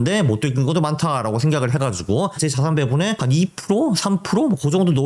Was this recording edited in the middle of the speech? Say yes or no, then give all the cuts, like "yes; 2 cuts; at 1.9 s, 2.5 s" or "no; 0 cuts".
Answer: yes; 2 cuts; at 2.4 s, 3.2 s